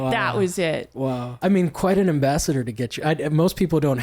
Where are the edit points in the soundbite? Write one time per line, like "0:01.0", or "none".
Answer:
0:01.3